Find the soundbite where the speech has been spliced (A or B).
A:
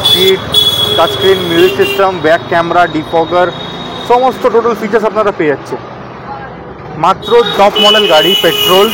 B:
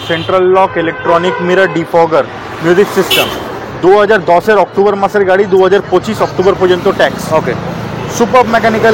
A